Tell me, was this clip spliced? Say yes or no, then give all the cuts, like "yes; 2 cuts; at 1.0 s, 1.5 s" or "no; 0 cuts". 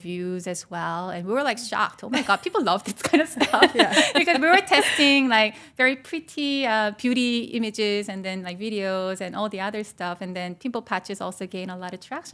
no; 0 cuts